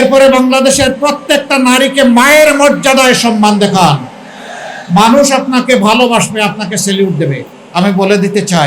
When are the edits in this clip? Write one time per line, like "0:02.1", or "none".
0:07.5